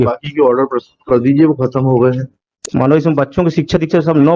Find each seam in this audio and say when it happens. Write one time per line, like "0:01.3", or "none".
0:02.6